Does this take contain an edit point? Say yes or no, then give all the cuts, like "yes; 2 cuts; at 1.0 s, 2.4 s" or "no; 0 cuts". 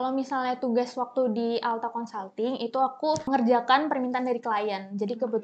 yes; 1 cut; at 3.2 s